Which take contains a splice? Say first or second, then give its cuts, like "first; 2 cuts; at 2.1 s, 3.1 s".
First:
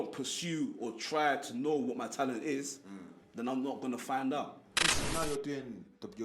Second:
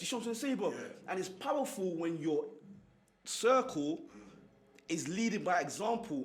first; 1 cut; at 4.9 s